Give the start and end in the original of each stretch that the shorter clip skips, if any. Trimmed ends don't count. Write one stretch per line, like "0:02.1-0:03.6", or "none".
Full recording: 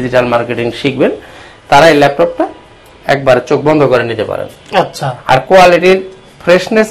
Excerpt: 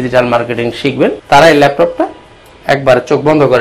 0:01.2-0:01.6